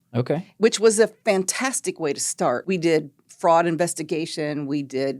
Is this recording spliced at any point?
yes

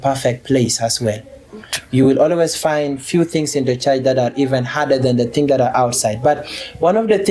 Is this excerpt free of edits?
yes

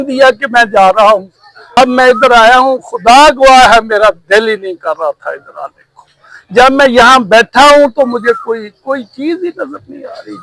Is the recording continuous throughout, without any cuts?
no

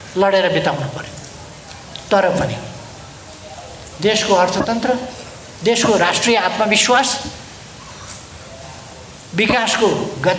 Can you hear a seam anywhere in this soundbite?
no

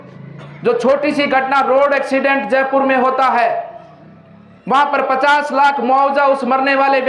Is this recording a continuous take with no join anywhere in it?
yes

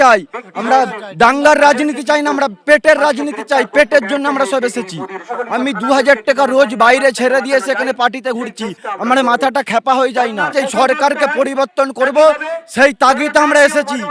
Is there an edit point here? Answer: yes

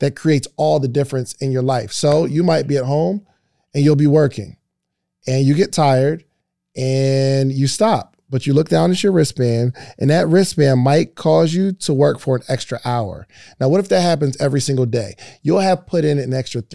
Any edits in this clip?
no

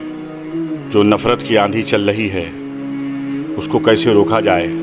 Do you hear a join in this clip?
yes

